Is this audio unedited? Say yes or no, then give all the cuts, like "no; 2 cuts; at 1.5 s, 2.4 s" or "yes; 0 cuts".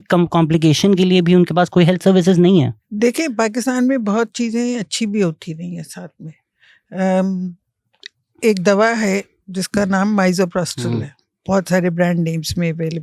yes; 0 cuts